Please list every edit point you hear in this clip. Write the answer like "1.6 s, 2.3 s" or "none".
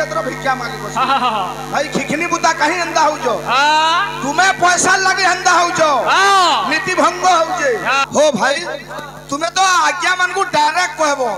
8.0 s

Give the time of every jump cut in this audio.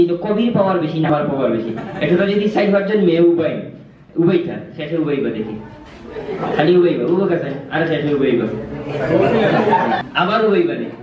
1.1 s, 10.0 s

